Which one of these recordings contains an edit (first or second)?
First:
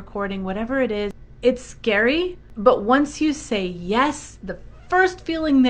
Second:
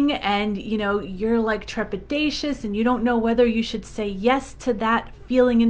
first